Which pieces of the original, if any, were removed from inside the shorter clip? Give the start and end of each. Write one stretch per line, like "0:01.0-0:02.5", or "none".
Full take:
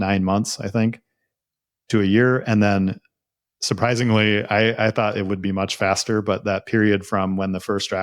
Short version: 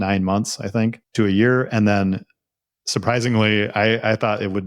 0:01.0-0:01.8